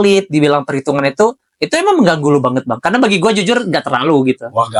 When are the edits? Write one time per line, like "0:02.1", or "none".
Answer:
none